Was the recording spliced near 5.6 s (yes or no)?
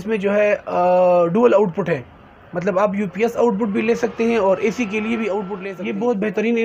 yes